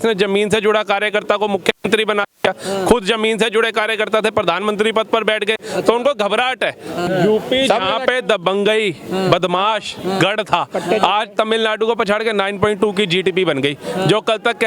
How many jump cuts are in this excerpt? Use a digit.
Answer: 1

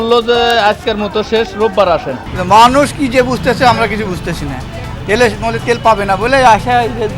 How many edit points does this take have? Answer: 1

